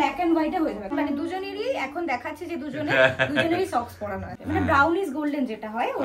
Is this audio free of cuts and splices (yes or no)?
no